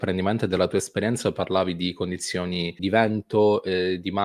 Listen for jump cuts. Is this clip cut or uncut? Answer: cut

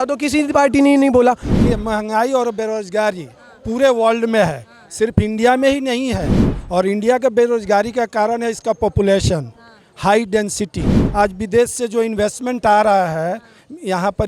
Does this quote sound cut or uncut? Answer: cut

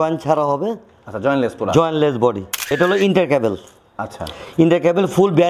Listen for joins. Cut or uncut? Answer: cut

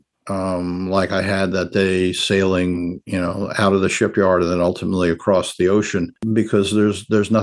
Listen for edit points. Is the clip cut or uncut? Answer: cut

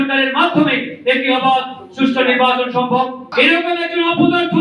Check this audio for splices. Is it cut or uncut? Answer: cut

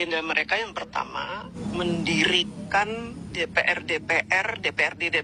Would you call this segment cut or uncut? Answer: cut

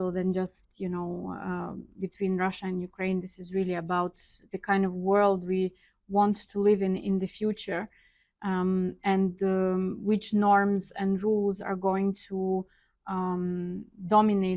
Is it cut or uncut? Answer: uncut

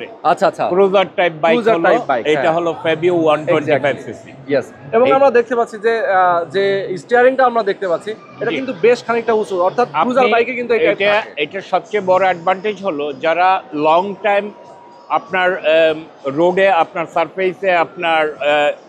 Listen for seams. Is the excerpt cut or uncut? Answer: uncut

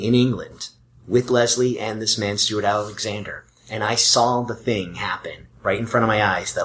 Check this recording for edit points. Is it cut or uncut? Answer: uncut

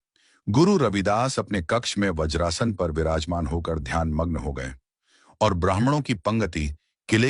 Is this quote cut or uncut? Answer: cut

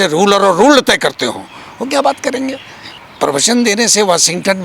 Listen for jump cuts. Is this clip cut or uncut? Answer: cut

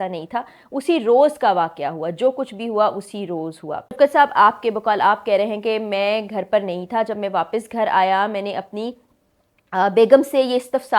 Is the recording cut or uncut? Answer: cut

